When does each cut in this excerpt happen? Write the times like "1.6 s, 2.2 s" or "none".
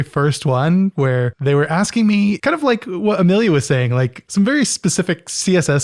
1.0 s, 2.4 s, 4.2 s